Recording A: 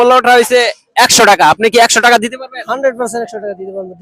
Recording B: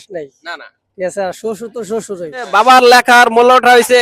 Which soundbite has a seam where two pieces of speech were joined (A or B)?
B